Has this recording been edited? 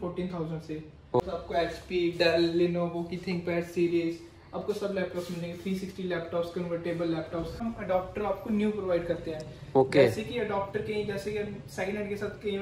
yes; 2 cuts; at 1.2 s, 7.7 s

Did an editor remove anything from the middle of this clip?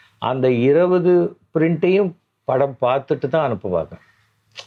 no; 0 cuts

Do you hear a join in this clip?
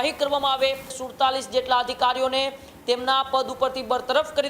yes; 1 cut; at 1.0 s

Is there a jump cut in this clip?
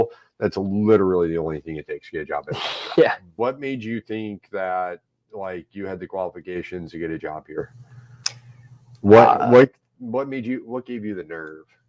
yes; 1 cut; at 3.3 s

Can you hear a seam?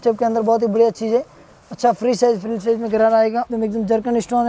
yes; 1 cut; at 3.5 s

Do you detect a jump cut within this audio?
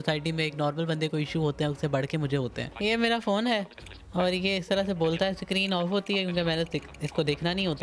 yes; 1 cut; at 2.7 s

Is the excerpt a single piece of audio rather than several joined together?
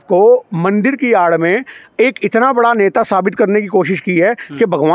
yes; 0 cuts

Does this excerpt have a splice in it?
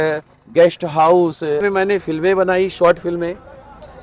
yes; 1 cut; at 1.6 s

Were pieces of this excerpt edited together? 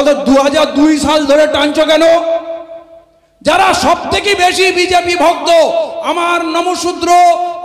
no; 0 cuts

